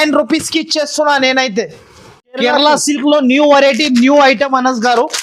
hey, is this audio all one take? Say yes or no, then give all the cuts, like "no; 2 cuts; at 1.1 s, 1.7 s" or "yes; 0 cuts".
yes; 0 cuts